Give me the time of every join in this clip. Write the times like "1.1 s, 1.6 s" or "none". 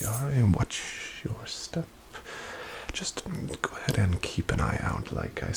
none